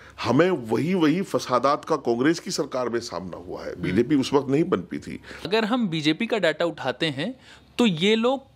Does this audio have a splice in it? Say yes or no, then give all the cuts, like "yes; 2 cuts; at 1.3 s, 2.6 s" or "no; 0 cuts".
yes; 1 cut; at 5.5 s